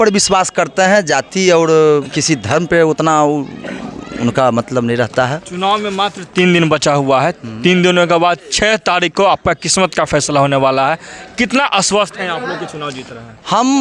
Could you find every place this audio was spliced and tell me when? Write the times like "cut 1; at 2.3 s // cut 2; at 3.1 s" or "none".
none